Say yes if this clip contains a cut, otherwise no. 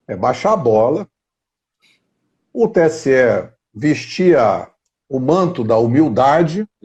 no